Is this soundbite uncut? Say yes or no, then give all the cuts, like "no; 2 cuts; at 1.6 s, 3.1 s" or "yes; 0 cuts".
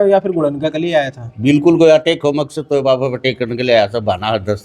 yes; 0 cuts